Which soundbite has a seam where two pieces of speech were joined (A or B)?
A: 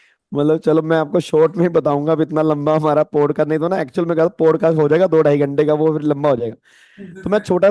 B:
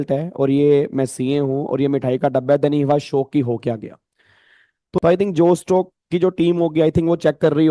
B